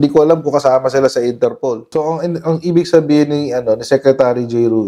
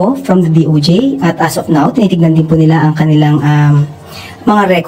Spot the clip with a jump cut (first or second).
first